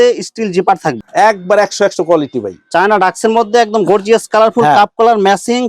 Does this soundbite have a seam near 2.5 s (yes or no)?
no